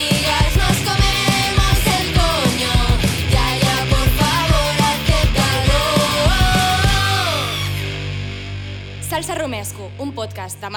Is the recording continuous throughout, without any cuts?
yes; 0 cuts

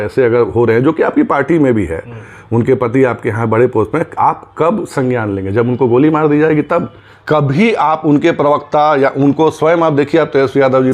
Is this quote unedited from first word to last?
no; 1 cut; at 7.1 s

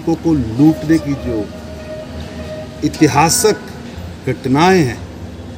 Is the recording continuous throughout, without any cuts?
yes; 0 cuts

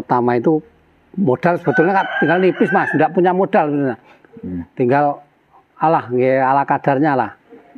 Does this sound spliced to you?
no; 0 cuts

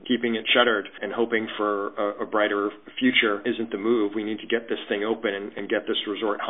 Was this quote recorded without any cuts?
no; 2 cuts; at 1.0 s, 3.4 s

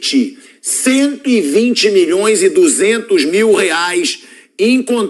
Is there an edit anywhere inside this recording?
no; 0 cuts

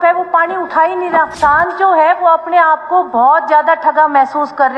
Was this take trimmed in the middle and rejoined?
yes; 1 cut; at 1.3 s

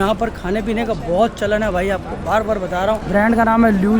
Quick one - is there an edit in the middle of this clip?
yes; 1 cut; at 3.0 s

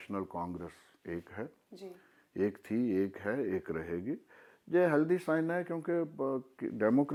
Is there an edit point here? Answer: no; 0 cuts

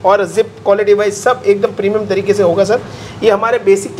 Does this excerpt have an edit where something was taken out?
no; 0 cuts

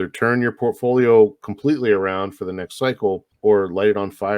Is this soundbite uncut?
no; 1 cut; at 3.3 s

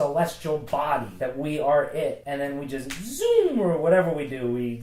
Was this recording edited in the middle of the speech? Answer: yes; 2 cuts; at 1.1 s, 2.2 s

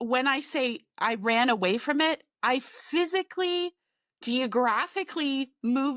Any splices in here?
no; 0 cuts

